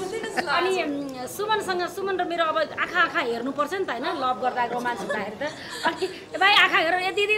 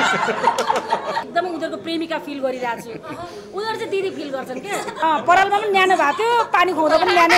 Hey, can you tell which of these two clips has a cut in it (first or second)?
second